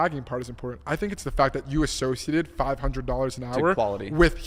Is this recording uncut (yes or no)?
yes